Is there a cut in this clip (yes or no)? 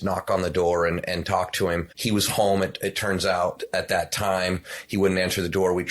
yes